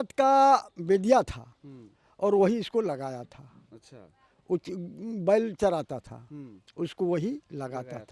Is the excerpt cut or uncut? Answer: uncut